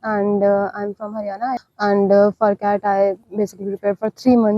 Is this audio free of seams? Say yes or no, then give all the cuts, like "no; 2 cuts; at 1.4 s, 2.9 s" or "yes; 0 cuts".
no; 1 cut; at 1.7 s